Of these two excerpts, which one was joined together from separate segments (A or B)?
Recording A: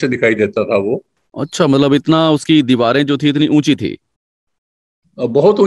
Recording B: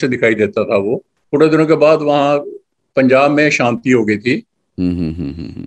B